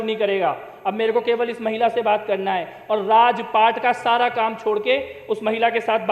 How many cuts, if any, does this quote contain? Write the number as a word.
zero